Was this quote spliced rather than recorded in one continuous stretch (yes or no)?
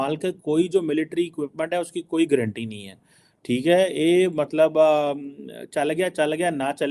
no